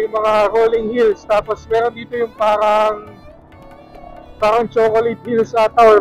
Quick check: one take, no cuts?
yes; 0 cuts

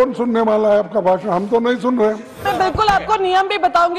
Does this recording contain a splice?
yes; 1 cut; at 2.4 s

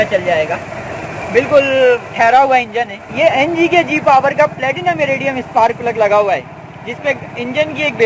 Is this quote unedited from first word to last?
no; 1 cut; at 3.0 s

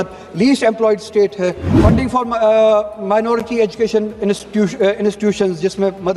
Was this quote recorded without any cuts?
no; 1 cut; at 1.7 s

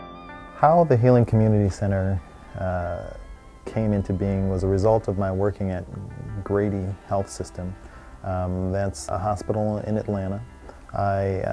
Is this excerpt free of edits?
no; 1 cut; at 4.6 s

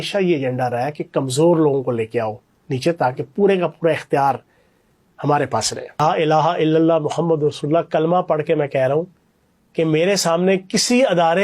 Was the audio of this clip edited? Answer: yes; 1 cut; at 6.0 s

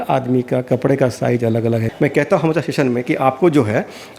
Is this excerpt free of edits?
no; 1 cut; at 1.9 s

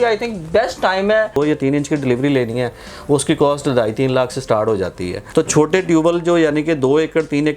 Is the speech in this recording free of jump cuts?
no; 2 cuts; at 1.4 s, 5.1 s

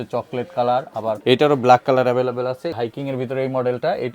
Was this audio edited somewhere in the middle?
yes; 2 cuts; at 1.1 s, 2.7 s

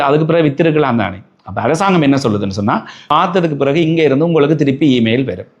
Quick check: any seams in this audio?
yes; 1 cut; at 2.9 s

